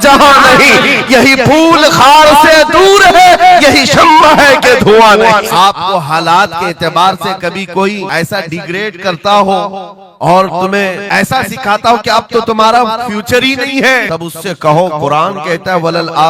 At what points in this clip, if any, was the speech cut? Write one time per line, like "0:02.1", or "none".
0:05.5
0:08.1
0:11.0
0:14.1